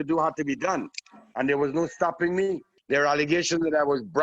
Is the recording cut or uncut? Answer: cut